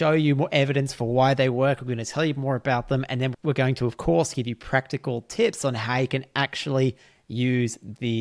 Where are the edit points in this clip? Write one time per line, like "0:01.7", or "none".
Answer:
0:03.3